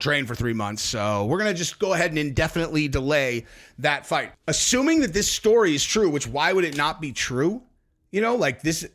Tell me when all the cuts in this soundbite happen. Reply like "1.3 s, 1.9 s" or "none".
4.3 s